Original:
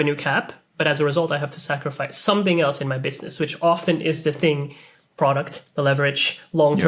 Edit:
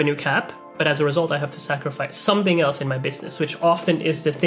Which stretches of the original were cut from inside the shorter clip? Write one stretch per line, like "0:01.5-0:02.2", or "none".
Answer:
none